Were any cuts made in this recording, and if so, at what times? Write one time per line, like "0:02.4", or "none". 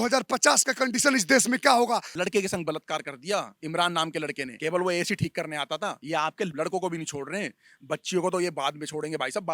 0:02.1
0:03.6
0:04.5
0:06.4